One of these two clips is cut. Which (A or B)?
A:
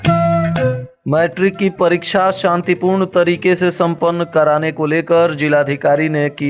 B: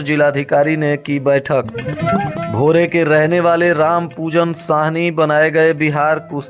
A